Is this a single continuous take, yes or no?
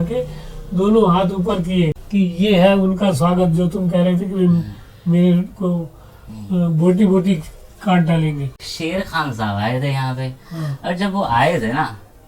no